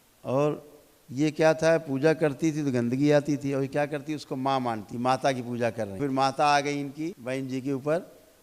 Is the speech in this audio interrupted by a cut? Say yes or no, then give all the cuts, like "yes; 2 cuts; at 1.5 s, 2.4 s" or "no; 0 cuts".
yes; 3 cuts; at 4.9 s, 6.0 s, 7.2 s